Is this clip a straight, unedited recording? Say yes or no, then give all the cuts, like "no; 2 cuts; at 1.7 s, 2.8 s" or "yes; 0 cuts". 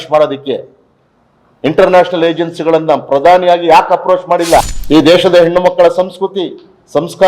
no; 1 cut; at 4.8 s